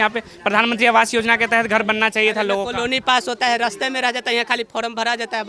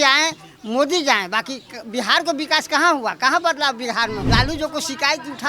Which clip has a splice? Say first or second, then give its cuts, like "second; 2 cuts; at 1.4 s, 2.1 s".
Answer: second; 1 cut; at 4.3 s